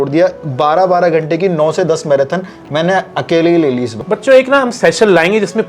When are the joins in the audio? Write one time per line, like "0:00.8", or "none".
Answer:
0:04.0